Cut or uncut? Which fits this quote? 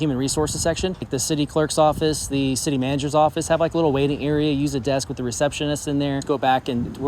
cut